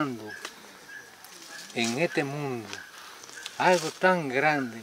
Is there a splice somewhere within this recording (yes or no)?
no